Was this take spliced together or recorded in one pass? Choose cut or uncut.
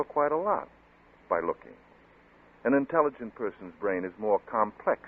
uncut